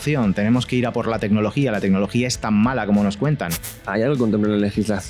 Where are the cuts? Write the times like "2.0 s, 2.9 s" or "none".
3.8 s